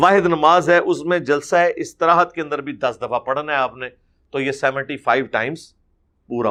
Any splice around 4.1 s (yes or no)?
no